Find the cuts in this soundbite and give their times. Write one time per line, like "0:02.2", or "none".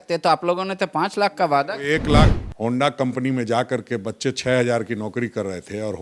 0:02.3